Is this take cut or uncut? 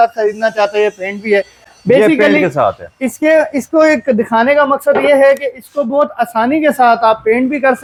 uncut